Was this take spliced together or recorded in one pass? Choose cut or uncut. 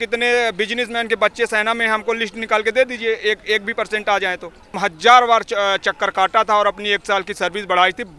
cut